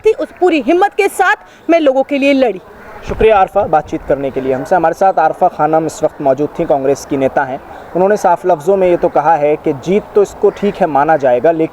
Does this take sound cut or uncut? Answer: uncut